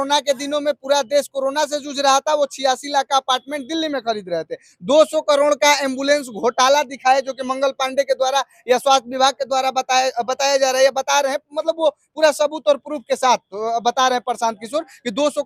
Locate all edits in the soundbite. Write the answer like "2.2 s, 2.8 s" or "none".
none